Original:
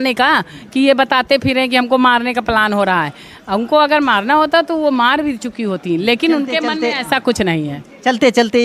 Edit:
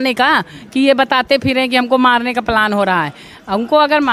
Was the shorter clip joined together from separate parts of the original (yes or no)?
no